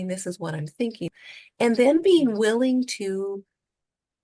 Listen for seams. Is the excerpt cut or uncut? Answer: cut